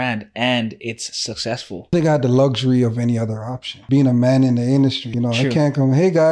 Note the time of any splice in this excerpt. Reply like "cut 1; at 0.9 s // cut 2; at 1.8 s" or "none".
cut 1; at 1.9 s // cut 2; at 3.7 s // cut 3; at 5.1 s